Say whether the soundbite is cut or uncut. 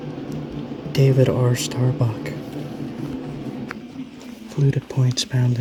uncut